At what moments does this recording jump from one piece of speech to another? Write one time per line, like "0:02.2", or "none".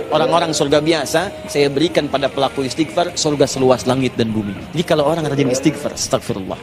0:04.6